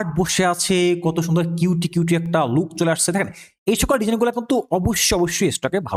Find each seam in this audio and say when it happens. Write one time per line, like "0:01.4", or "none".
none